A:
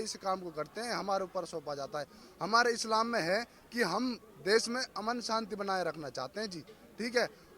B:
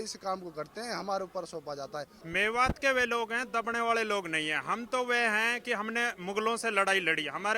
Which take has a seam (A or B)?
B